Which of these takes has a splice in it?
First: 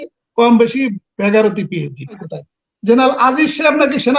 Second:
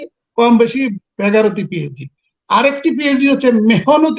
first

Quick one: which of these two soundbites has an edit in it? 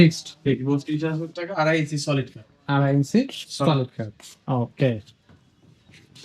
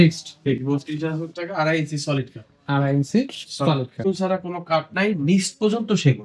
second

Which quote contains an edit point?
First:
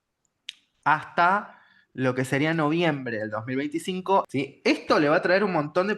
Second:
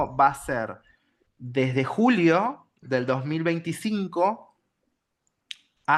first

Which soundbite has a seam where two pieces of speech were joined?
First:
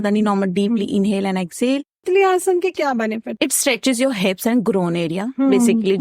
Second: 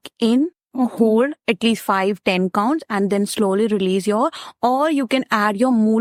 first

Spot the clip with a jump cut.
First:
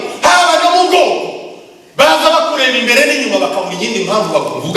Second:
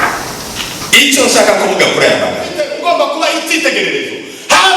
second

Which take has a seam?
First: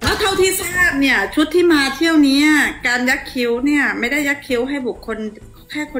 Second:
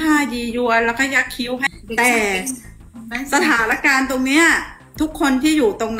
second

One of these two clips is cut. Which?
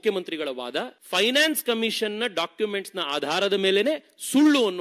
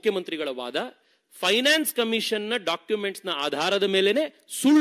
first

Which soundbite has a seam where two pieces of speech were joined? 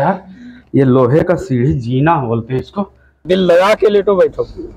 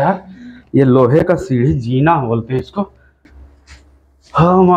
first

